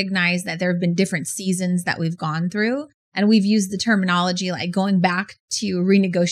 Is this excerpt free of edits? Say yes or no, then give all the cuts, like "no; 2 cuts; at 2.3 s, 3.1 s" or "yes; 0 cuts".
yes; 0 cuts